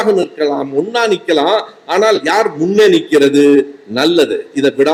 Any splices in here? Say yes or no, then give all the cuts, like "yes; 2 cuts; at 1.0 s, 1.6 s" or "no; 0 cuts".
no; 0 cuts